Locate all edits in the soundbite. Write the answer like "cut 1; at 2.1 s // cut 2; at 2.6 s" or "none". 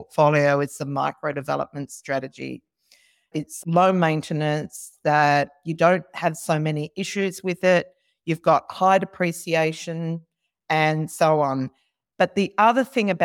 cut 1; at 3.3 s